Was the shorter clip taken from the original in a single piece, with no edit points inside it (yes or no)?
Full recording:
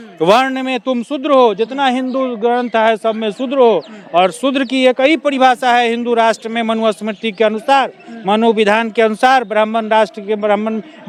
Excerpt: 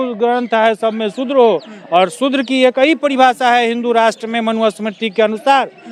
yes